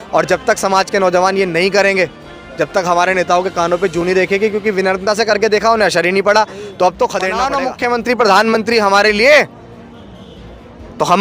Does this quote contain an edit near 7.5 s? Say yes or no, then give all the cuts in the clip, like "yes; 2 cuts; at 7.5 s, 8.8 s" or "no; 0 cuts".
yes; 1 cut; at 7.5 s